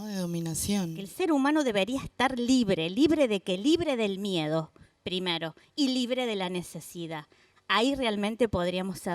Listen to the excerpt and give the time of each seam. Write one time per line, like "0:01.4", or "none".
0:01.0